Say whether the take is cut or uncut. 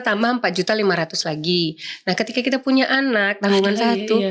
uncut